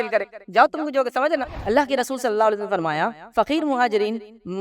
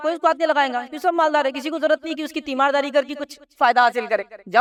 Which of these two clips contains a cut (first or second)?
first